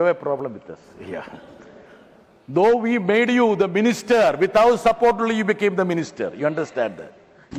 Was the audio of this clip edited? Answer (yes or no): no